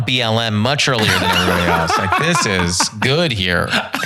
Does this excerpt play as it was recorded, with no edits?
yes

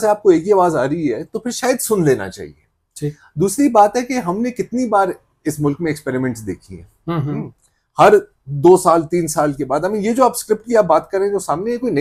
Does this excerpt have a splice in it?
no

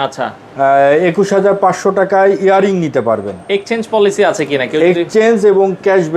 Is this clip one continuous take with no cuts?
yes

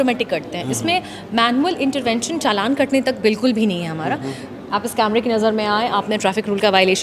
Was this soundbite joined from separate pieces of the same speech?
yes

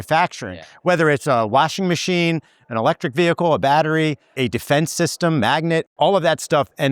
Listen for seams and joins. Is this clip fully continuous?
no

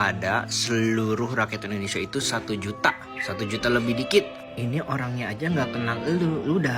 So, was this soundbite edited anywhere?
no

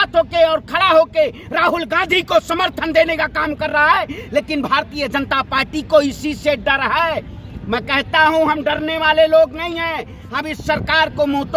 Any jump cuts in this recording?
no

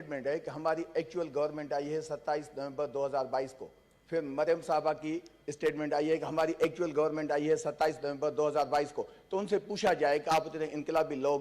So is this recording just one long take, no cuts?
yes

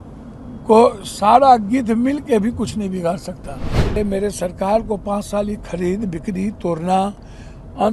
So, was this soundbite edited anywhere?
yes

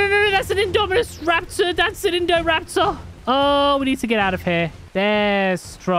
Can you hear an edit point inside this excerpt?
yes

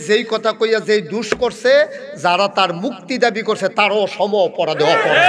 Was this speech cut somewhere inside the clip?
no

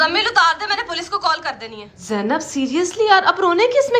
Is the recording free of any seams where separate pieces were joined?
no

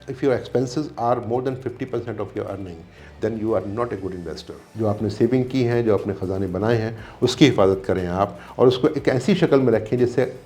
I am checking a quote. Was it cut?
yes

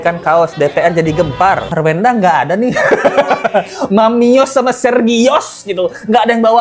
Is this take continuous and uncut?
no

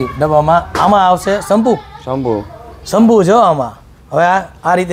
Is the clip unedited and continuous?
yes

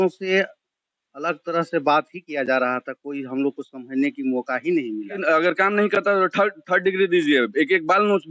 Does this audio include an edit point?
yes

